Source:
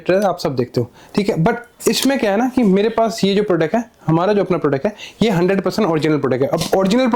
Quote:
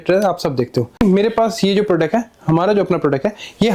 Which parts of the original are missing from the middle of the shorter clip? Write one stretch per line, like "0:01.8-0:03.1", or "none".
0:01.0-0:02.6